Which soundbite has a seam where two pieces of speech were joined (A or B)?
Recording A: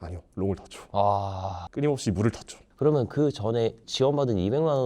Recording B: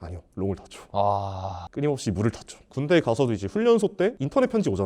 B